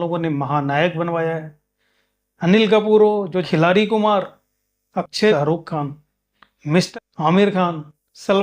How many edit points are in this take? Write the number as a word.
three